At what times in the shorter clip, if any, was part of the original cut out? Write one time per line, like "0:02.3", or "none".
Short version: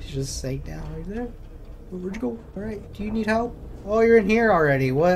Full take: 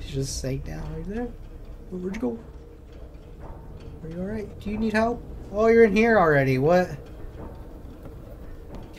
0:02.6